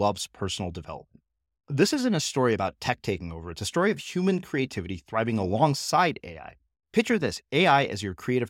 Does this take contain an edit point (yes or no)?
no